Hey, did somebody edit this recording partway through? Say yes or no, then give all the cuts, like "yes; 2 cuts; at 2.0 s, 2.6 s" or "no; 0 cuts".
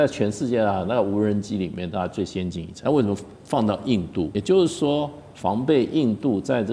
yes; 2 cuts; at 2.7 s, 4.3 s